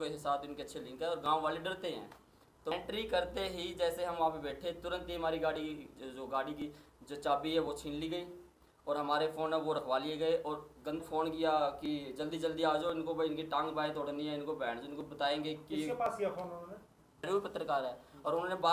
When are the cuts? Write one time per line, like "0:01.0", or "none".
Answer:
0:02.7
0:11.0
0:17.2